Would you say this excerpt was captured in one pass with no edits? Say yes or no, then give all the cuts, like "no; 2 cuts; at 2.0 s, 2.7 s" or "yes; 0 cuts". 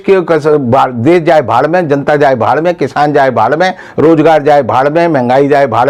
yes; 0 cuts